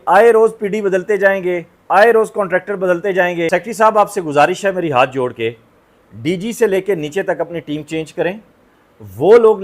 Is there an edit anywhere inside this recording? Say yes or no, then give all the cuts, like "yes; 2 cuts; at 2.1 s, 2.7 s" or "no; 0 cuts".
yes; 1 cut; at 3.5 s